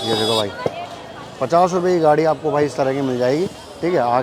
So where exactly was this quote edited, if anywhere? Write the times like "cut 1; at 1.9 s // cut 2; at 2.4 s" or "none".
none